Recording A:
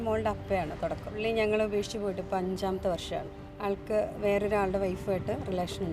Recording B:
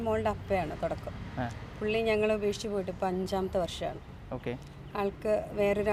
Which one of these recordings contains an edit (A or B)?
A